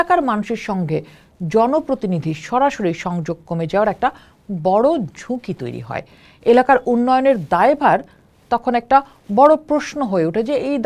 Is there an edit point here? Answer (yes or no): no